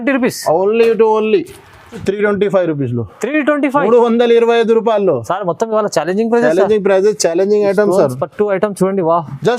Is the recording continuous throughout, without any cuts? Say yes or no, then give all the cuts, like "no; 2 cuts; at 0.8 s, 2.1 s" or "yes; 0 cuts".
no; 1 cut; at 2.0 s